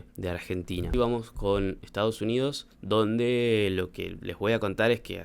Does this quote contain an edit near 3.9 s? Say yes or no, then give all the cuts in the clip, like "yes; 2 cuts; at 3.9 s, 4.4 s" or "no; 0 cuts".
no; 1 cut; at 0.9 s